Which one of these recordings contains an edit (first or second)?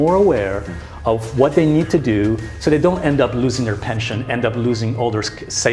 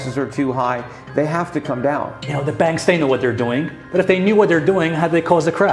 second